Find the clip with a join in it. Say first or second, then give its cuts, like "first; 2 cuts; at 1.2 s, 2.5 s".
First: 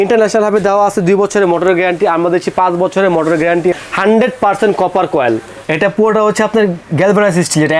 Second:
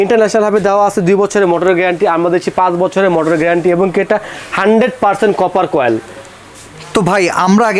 first; 2 cuts; at 3.7 s, 5.6 s